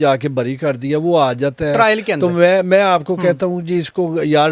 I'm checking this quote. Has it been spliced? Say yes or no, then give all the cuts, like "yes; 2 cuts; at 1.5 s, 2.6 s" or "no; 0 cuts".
no; 0 cuts